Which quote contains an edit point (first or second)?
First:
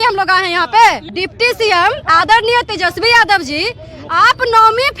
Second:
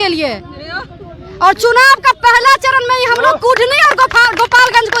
first